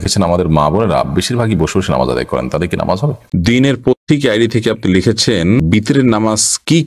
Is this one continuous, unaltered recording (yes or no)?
no